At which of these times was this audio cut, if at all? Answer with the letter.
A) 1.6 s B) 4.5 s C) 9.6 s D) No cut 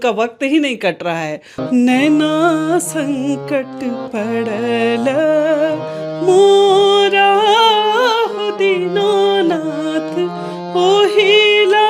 A